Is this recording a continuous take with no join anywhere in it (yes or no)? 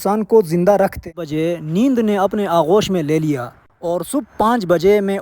no